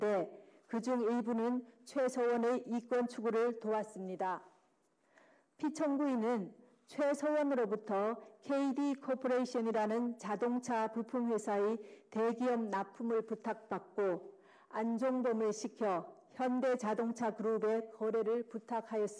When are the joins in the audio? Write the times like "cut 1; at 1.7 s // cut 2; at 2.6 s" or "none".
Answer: cut 1; at 11.5 s